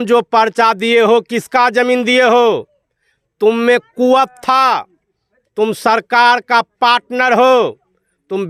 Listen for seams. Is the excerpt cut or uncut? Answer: uncut